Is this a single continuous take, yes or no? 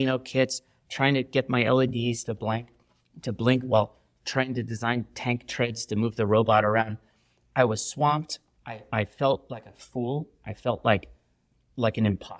yes